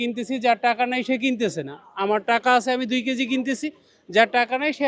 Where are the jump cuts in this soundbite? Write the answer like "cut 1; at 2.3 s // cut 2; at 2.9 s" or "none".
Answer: none